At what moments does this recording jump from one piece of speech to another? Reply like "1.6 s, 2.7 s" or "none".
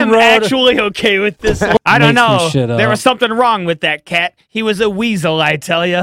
1.8 s